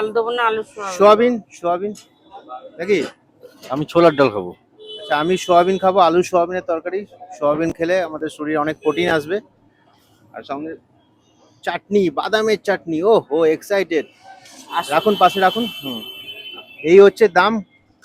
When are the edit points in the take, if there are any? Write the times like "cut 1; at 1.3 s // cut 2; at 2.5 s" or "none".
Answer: none